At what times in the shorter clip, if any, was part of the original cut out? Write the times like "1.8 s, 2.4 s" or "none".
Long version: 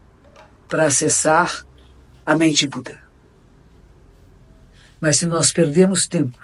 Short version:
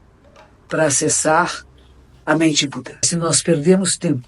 3.1 s